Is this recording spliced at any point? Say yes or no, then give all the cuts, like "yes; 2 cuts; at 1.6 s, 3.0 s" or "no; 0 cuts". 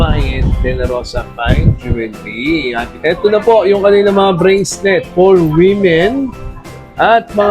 yes; 1 cut; at 2.8 s